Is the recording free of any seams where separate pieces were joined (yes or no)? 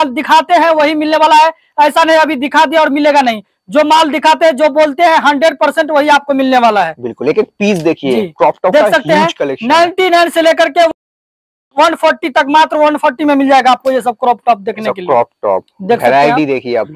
yes